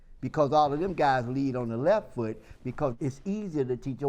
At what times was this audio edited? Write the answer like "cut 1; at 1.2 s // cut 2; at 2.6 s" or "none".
cut 1; at 2.9 s